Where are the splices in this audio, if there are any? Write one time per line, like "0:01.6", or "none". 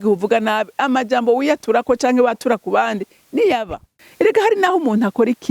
0:04.0